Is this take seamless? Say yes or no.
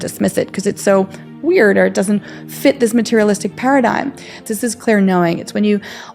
no